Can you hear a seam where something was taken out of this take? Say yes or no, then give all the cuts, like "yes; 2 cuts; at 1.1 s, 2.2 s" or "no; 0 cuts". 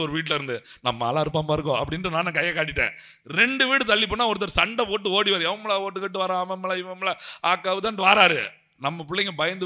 no; 0 cuts